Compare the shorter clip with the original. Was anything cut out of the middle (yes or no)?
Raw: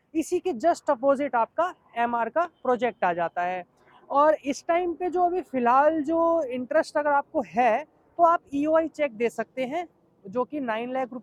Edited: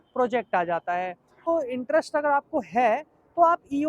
yes